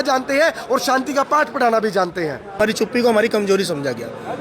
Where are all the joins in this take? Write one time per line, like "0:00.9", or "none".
0:02.6

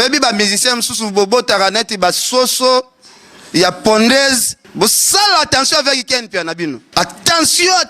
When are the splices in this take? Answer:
0:04.6
0:06.8

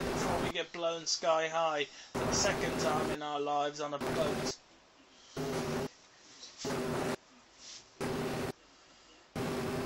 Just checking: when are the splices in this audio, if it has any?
none

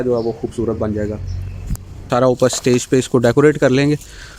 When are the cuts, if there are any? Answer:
0:02.1

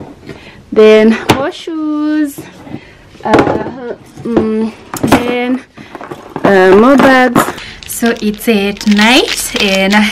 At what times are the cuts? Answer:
0:07.6

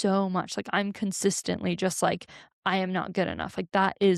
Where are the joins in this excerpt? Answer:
none

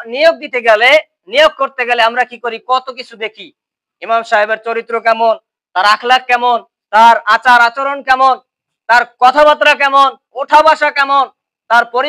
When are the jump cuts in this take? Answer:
none

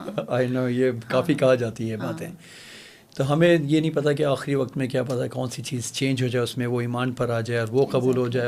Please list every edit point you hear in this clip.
none

